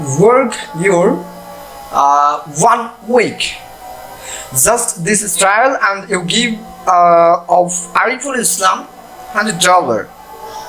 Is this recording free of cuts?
yes; 0 cuts

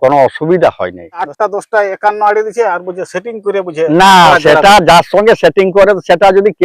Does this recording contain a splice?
yes; 1 cut; at 1.3 s

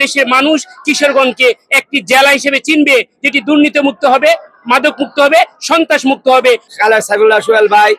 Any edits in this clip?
yes; 1 cut; at 6.6 s

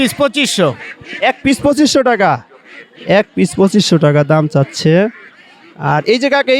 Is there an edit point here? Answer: no; 0 cuts

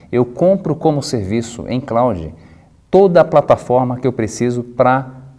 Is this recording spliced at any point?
yes; 1 cut; at 3.9 s

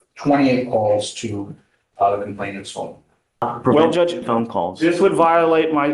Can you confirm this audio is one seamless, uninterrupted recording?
no; 1 cut; at 3.5 s

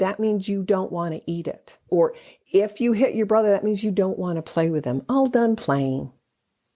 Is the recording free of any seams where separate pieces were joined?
no; 1 cut; at 1.9 s

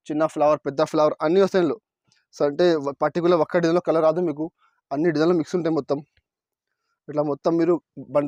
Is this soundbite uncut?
yes; 0 cuts

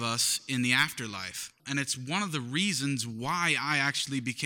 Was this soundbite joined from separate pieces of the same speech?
yes; 1 cut; at 1.6 s

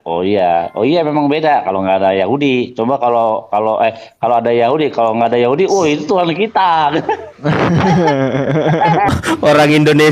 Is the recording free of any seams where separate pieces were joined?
no; 1 cut; at 9.1 s

